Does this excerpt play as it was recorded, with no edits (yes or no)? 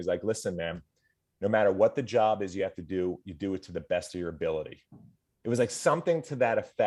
yes